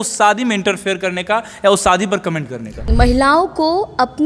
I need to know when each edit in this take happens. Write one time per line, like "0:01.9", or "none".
0:02.9